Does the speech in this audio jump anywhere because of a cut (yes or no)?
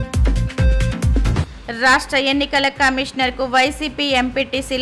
yes